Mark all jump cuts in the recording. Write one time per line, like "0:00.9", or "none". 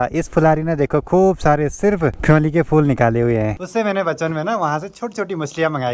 0:02.2
0:03.5